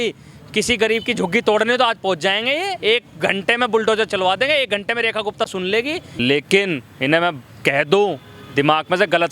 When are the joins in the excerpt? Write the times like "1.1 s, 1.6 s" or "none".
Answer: 6.1 s